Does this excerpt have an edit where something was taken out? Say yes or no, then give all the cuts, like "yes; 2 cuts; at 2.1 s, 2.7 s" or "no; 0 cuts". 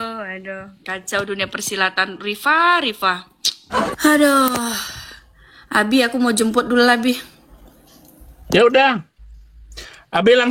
yes; 1 cut; at 3.9 s